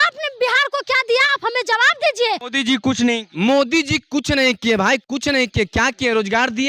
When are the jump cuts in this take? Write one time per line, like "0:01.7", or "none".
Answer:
0:02.5